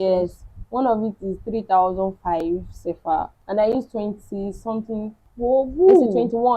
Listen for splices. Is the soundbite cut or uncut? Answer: cut